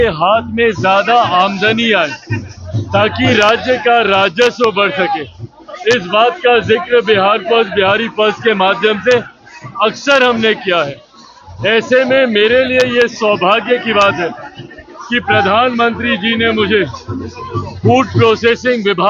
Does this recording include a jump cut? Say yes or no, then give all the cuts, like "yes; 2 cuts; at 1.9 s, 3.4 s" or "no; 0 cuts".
no; 0 cuts